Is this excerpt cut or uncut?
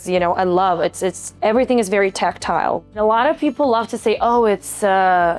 cut